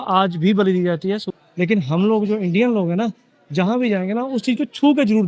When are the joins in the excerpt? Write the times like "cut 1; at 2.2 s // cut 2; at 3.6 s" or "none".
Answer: cut 1; at 1.3 s